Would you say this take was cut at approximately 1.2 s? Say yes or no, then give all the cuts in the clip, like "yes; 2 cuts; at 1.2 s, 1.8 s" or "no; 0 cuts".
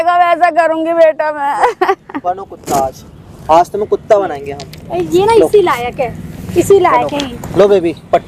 no; 0 cuts